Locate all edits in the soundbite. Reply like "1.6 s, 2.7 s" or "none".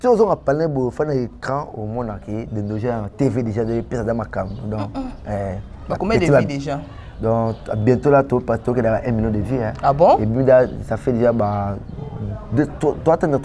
none